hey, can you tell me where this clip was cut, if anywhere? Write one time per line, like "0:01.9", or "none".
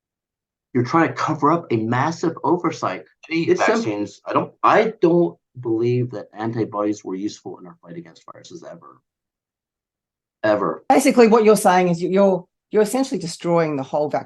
0:03.8
0:10.9